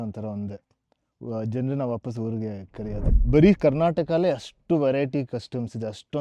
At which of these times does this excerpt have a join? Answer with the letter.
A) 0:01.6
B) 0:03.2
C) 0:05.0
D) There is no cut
B